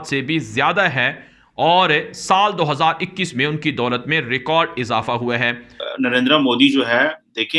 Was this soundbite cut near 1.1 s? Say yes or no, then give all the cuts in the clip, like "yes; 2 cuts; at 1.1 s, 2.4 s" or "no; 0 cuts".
no; 0 cuts